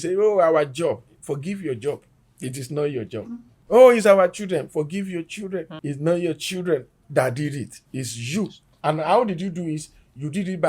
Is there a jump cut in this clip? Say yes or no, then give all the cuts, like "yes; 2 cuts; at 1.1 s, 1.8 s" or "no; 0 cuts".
no; 0 cuts